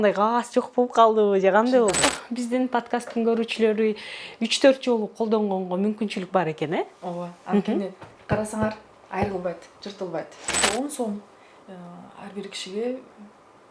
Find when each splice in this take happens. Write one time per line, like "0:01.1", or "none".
0:02.1
0:10.6

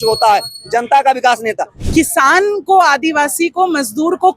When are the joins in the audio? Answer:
0:01.7

